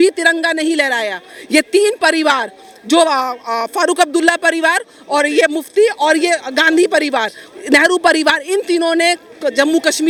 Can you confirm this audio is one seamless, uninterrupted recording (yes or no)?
yes